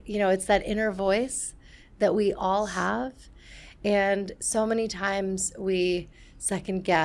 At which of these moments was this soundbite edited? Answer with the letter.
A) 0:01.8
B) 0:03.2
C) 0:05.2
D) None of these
D